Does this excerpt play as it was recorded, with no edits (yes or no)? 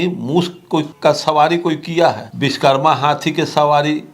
no